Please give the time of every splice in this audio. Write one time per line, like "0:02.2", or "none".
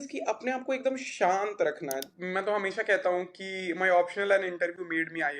0:02.0